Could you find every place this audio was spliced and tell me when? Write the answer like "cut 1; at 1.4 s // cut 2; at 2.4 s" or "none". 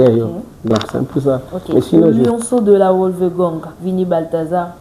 cut 1; at 2.2 s